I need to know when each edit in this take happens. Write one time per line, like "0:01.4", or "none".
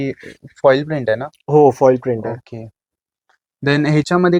none